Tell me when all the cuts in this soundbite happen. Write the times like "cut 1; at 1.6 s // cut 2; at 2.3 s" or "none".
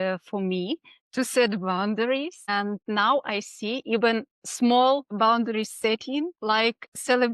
cut 1; at 2.7 s // cut 2; at 4.4 s // cut 3; at 5.1 s // cut 4; at 6.3 s

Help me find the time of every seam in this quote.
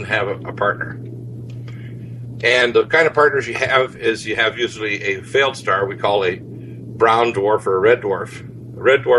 none

